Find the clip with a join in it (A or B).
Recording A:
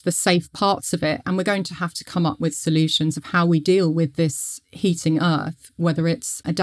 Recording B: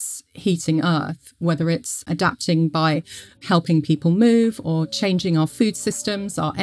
A